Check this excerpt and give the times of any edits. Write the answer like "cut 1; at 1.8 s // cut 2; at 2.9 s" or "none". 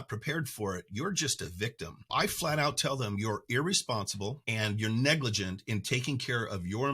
cut 1; at 2.1 s // cut 2; at 4.4 s